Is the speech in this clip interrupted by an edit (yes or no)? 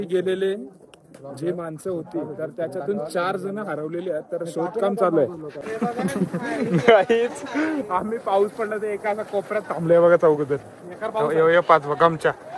yes